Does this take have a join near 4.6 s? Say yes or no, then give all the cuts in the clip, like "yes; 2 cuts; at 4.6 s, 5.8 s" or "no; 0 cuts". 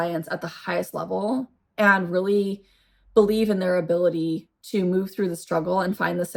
no; 0 cuts